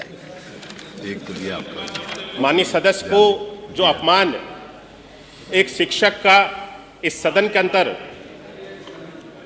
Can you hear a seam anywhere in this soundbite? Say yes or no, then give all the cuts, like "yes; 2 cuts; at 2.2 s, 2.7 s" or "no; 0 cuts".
no; 0 cuts